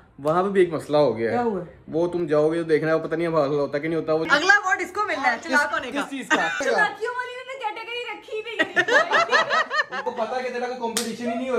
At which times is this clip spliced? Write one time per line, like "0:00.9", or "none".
0:04.2
0:06.6